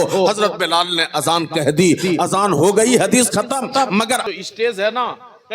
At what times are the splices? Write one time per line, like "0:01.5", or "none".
0:04.3